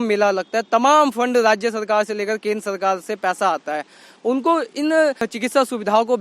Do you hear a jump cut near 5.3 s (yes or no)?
yes